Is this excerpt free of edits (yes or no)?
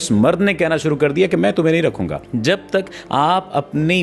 no